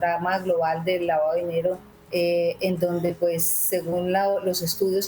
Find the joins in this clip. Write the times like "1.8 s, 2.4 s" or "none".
1.9 s